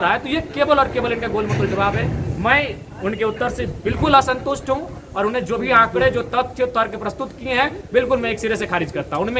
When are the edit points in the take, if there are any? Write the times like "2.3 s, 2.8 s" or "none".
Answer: none